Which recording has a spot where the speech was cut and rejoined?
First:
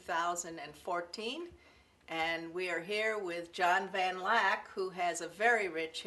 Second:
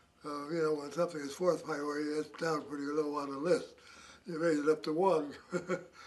second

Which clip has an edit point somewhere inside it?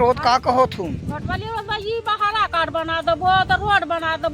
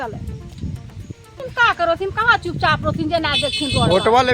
second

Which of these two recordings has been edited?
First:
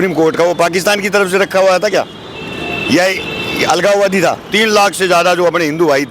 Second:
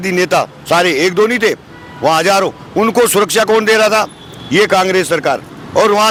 first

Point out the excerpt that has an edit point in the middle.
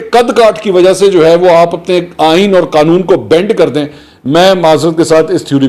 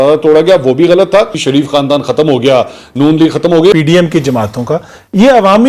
second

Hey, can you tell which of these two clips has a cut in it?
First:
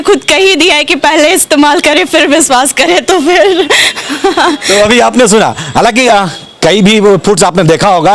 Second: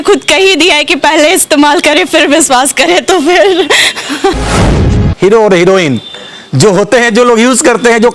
second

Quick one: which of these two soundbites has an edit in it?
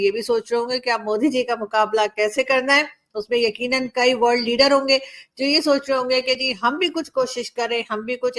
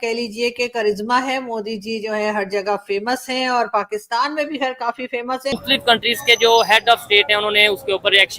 second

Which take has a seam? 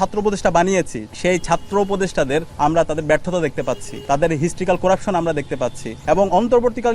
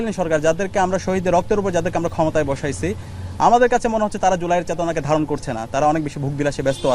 first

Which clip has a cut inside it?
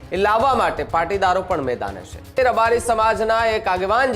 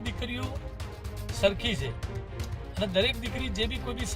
first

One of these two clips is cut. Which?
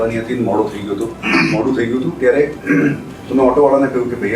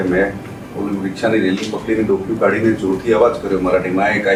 first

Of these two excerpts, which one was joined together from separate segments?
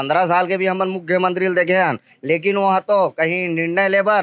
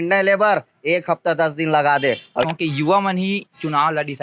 second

